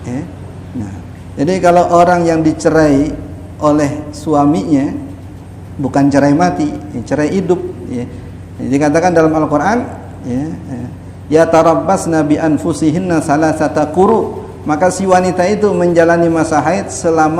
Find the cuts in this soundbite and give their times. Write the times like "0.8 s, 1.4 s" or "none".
none